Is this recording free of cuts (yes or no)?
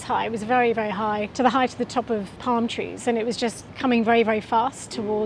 no